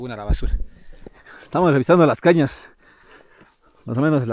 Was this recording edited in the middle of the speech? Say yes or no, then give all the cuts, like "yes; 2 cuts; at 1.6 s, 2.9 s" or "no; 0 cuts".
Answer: yes; 1 cut; at 1.1 s